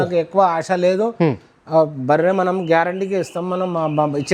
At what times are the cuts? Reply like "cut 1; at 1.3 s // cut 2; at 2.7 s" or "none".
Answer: none